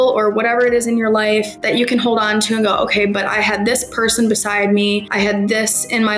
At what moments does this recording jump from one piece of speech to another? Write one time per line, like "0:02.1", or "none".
0:01.6
0:05.1